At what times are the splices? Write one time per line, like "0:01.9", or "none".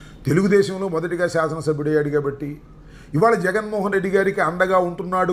none

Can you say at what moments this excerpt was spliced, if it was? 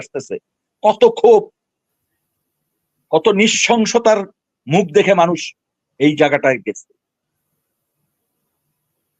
none

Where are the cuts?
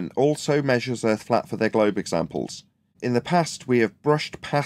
0:03.0

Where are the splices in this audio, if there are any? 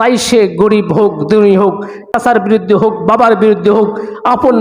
0:02.1

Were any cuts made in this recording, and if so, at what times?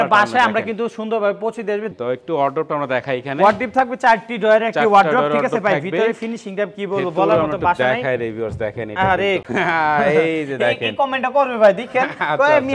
0:01.9
0:09.4

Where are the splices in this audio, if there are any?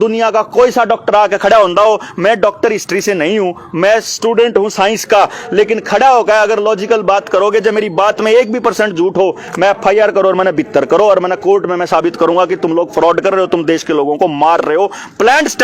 none

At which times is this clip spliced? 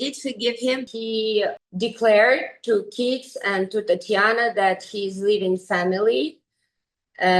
0:00.8
0:01.6

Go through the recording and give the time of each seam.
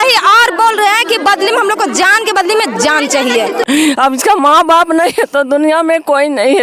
0:03.6

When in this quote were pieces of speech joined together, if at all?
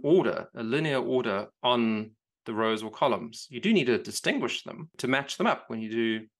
0:04.9

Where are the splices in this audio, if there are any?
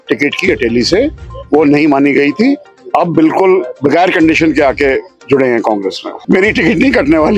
0:06.2

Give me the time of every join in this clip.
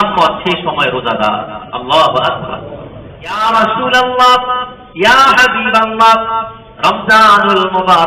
0:03.4
0:06.6

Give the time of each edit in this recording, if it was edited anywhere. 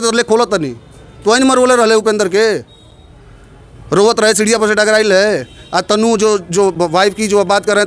none

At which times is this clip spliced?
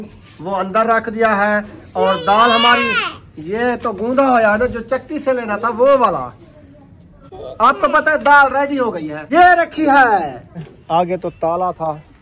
0:09.1
0:10.7

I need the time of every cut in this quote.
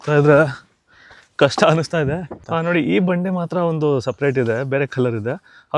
0:02.3

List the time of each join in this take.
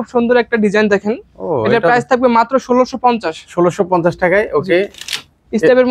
none

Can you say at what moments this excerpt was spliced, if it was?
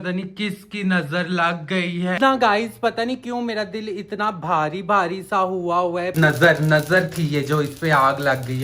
0:02.2
0:06.1

